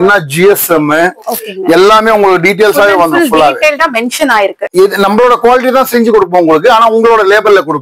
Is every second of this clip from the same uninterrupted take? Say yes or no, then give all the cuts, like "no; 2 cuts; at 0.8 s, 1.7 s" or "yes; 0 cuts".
no; 1 cut; at 4.6 s